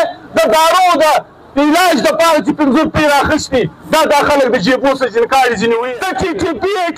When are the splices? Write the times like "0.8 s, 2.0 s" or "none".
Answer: 5.8 s